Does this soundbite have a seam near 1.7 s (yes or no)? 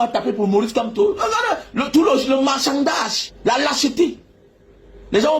no